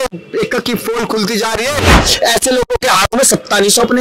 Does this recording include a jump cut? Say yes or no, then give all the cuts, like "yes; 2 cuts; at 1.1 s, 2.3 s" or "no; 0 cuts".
yes; 1 cut; at 2.0 s